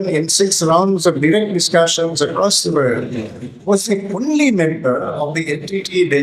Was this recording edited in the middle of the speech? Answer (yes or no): no